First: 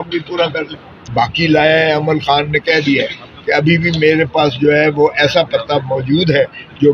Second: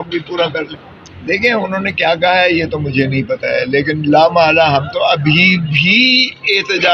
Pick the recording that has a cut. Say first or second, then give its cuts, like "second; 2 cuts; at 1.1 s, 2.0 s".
first; 1 cut; at 1.0 s